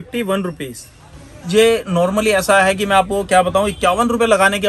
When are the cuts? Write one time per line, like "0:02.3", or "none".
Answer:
none